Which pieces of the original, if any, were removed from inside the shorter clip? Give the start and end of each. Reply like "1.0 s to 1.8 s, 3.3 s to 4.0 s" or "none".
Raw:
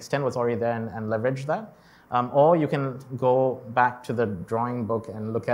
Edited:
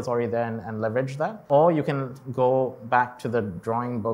1.7 s to 2.3 s